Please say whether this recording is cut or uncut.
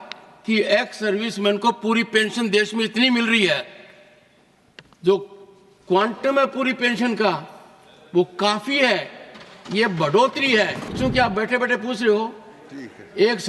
cut